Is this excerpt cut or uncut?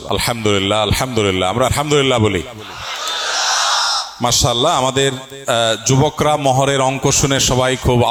uncut